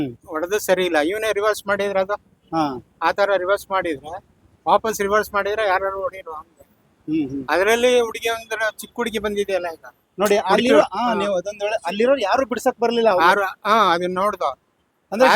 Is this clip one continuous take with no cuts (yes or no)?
yes